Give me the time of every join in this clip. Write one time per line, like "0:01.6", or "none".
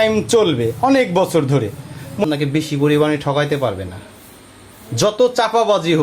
0:02.2